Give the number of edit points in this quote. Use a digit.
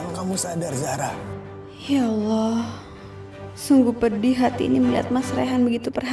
1